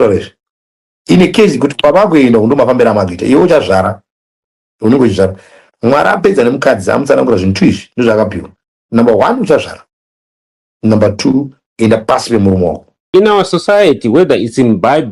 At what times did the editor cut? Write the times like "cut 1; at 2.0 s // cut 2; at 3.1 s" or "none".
cut 1; at 13.1 s